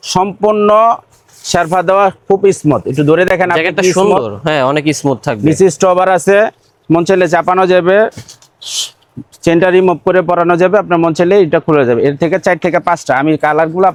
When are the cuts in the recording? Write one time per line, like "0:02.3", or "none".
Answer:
none